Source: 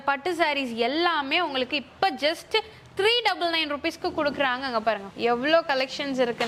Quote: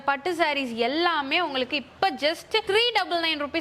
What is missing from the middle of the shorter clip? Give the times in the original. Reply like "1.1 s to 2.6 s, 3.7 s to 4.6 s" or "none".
2.6 s to 2.9 s

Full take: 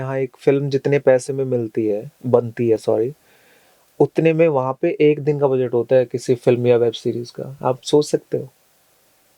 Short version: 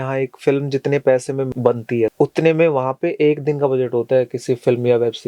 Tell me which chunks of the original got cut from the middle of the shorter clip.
1.5 s to 3.3 s

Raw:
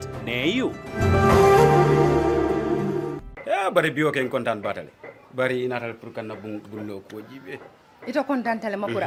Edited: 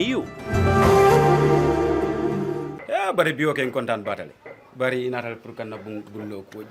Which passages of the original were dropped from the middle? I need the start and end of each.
3.2 s to 3.3 s

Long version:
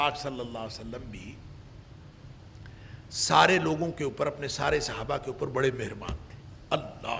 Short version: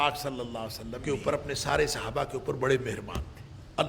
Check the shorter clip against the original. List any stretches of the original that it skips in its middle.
1.0 s to 4.0 s

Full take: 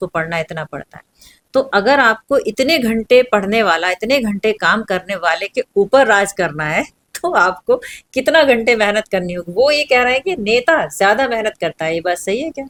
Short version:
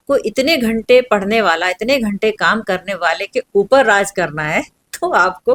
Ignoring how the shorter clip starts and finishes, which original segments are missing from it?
none

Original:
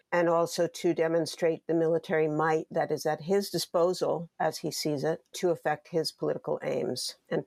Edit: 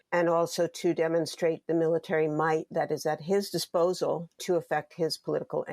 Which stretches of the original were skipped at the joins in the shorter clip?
4.3 s to 5.2 s

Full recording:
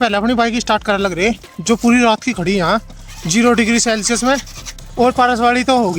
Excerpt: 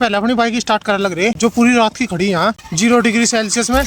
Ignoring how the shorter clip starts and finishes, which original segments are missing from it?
1.4 s to 1.6 s, 2.9 s to 3.2 s

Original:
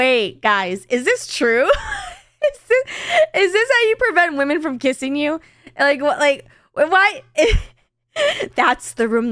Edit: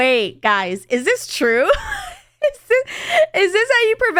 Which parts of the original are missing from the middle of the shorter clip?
none

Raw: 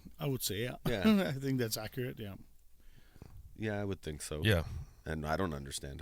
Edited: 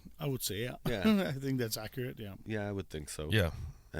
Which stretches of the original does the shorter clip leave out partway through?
2.3 s to 3.4 s

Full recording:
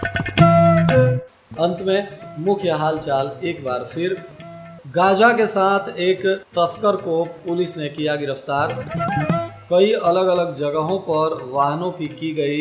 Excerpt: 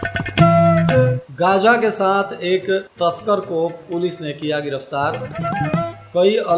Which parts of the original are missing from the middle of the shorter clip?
1.2 s to 4.8 s

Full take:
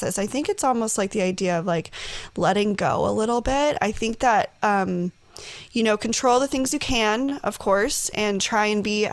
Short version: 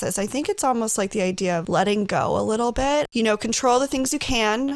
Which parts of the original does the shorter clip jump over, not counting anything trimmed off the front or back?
1.6 s to 2.3 s, 3.8 s to 5.7 s

